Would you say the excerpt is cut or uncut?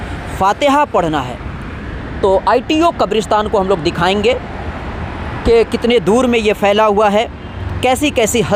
uncut